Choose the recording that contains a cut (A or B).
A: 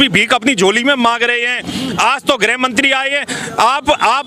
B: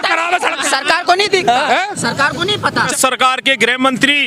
B